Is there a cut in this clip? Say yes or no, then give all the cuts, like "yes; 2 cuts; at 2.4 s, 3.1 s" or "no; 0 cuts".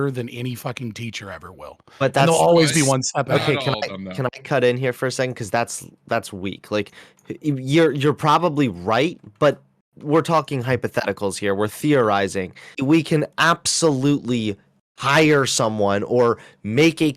yes; 2 cuts; at 1.9 s, 12.8 s